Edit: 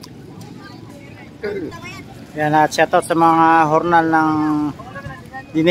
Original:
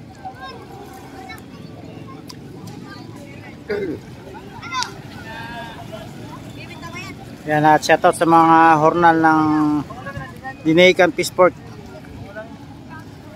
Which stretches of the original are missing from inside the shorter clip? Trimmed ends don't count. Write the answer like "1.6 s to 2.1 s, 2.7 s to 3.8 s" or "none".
4.0 s to 6.9 s